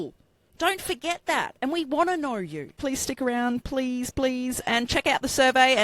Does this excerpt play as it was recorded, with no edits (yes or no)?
no